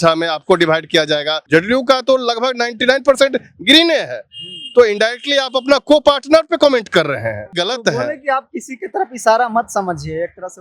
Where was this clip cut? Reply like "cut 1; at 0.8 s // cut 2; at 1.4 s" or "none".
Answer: cut 1; at 1.3 s // cut 2; at 7.6 s